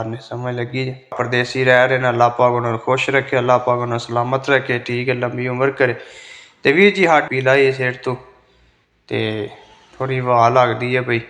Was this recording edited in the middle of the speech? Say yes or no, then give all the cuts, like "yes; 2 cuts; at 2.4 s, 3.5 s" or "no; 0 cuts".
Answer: yes; 2 cuts; at 1.1 s, 7.2 s